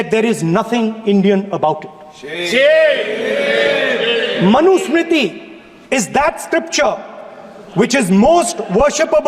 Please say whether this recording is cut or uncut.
uncut